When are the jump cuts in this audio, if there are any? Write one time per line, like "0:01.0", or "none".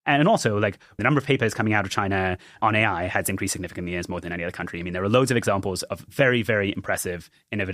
0:01.0
0:02.6
0:06.1

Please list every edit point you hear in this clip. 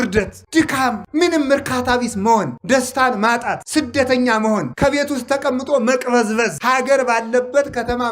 0:00.9
0:02.6
0:03.6
0:04.7
0:06.6

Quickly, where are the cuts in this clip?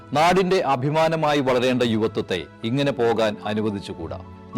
none

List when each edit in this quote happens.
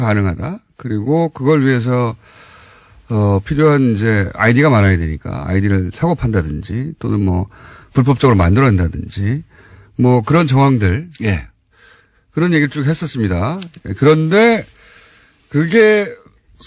0:07.6

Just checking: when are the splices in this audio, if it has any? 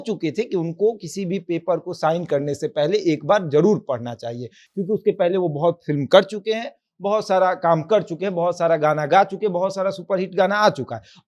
none

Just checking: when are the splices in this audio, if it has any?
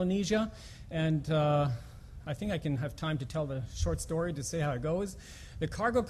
none

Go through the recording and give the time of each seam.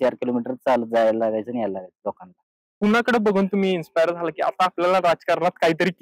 0:02.7

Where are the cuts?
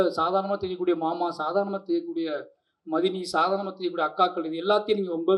none

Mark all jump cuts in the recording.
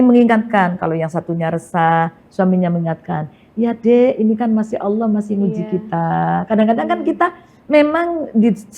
none

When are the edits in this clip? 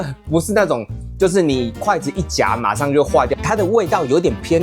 0:03.3

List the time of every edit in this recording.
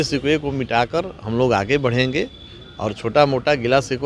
none

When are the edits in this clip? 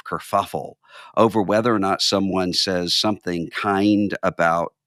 none

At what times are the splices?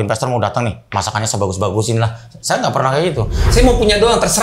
0:03.5

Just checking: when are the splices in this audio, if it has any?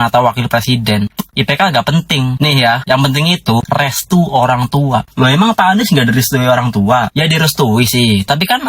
0:03.7

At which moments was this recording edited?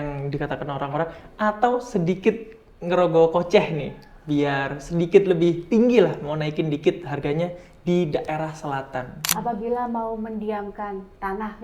0:09.2

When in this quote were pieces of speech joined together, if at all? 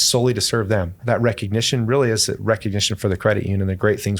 0:01.0

